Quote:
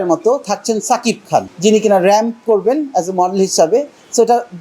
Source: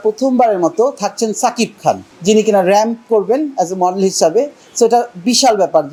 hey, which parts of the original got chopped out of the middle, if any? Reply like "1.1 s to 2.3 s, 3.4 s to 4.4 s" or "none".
2.0 s to 2.1 s